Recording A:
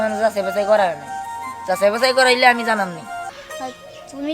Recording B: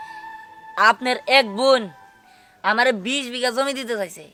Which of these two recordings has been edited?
A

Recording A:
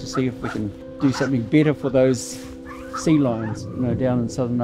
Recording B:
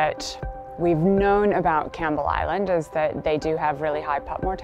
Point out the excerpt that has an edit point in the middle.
A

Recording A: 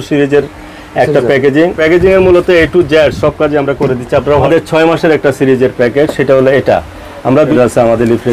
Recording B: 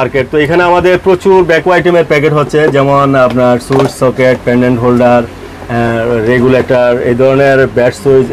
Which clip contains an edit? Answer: A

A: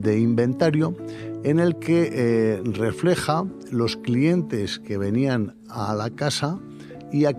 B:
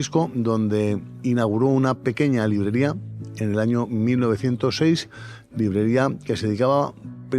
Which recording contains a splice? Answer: B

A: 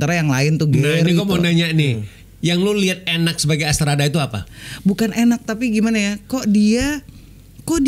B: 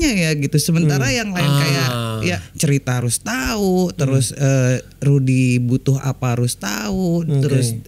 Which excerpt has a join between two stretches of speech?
B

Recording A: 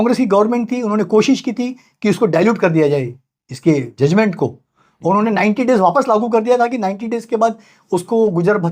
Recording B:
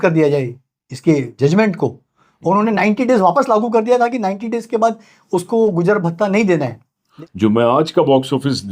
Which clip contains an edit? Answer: B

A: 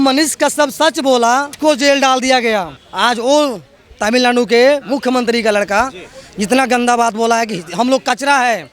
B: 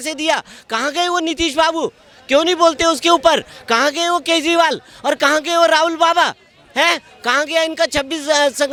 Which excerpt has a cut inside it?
A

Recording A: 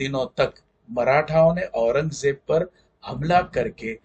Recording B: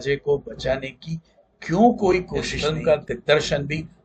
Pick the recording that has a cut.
B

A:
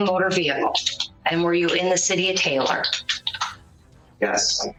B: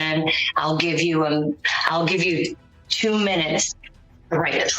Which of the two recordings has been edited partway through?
B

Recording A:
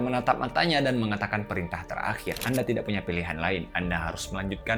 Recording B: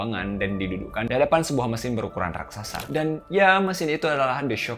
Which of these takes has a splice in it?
B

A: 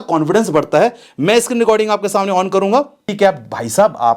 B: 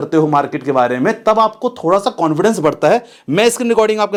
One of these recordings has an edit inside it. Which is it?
A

